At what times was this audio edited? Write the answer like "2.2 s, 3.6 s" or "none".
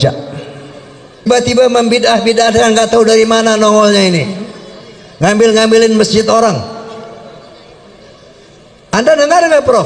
1.3 s

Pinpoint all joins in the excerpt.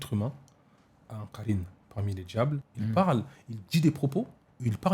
2.7 s

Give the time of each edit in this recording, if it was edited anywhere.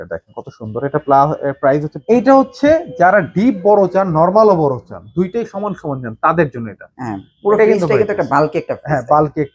1.9 s

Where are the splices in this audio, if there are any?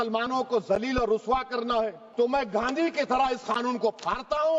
2.0 s

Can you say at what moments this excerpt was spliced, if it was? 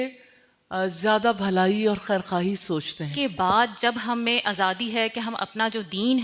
3.1 s

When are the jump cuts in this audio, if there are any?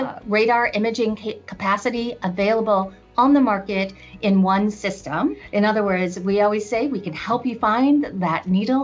5.4 s

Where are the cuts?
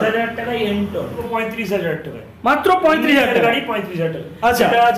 1.2 s

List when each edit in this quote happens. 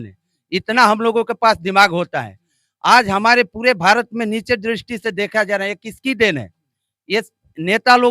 none

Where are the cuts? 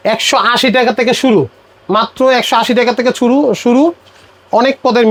none

